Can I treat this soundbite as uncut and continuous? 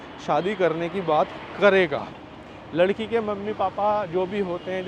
yes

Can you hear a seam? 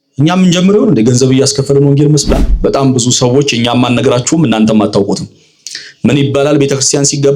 yes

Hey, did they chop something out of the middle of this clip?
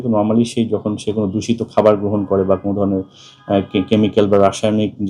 no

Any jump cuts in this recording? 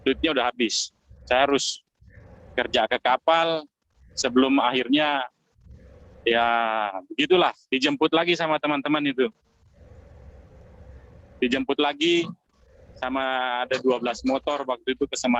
no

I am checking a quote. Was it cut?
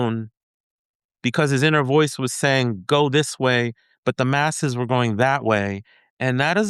no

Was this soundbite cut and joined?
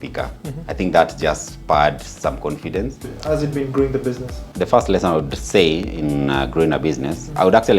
yes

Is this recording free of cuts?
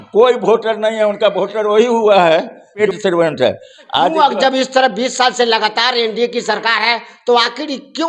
no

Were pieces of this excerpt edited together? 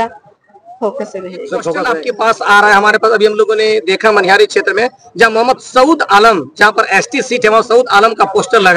yes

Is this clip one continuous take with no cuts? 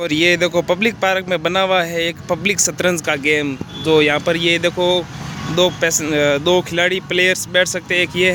yes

